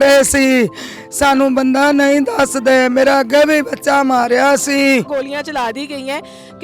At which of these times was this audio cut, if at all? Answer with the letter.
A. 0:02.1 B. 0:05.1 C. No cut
B